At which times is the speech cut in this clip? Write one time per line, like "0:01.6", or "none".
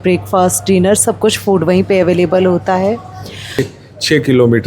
0:03.6